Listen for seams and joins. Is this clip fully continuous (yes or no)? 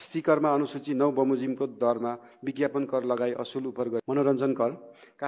no